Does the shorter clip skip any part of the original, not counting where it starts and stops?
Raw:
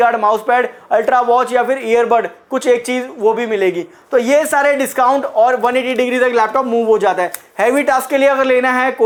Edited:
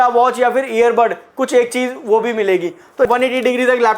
yes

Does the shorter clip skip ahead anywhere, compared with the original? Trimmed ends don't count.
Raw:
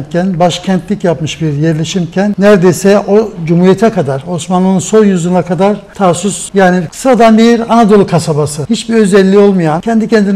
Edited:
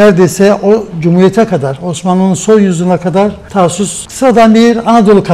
yes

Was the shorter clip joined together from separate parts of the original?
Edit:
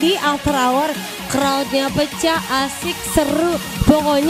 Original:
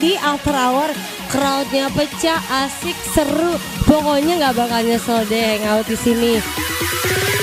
no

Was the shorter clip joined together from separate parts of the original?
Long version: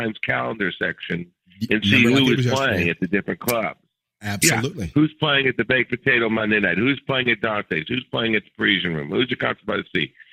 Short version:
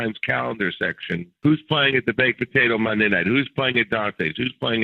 yes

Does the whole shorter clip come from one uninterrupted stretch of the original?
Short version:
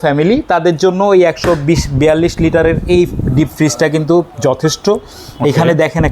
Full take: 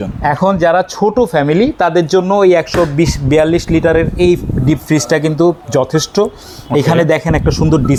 yes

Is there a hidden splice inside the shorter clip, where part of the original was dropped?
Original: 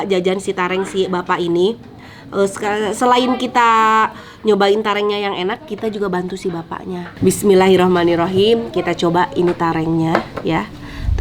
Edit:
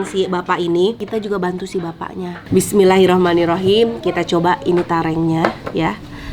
yes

